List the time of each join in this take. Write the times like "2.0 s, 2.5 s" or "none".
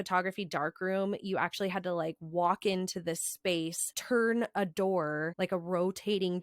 3.9 s, 5.3 s